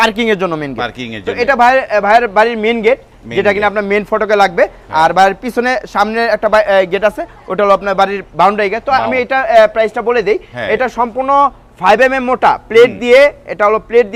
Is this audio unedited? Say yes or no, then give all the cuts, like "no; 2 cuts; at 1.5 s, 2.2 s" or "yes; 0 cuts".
yes; 0 cuts